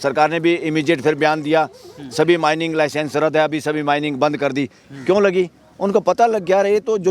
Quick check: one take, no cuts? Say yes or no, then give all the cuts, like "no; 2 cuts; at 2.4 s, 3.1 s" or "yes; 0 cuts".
yes; 0 cuts